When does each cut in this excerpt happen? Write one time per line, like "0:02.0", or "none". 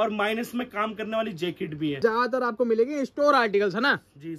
0:02.0

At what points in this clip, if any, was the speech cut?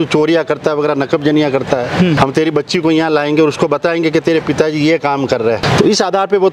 0:02.2
0:05.6

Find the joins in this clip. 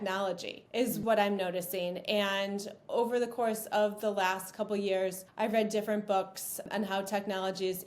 0:01.0
0:05.2
0:06.6

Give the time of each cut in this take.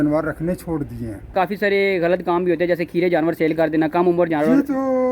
0:01.3

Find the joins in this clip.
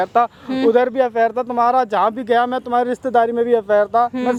none

